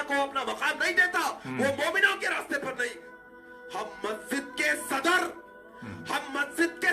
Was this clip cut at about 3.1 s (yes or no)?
yes